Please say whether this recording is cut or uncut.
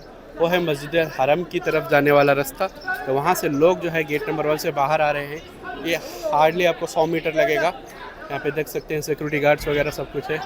uncut